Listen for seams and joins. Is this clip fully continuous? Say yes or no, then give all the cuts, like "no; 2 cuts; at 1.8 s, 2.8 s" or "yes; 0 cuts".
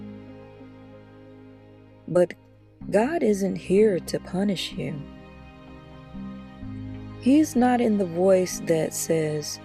yes; 0 cuts